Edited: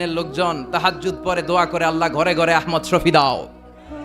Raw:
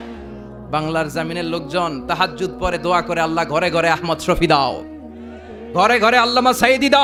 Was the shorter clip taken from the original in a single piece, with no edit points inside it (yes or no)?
yes